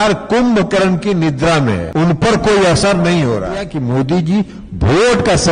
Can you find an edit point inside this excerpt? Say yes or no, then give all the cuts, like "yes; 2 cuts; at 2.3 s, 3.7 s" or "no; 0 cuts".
yes; 2 cuts; at 1.9 s, 3.7 s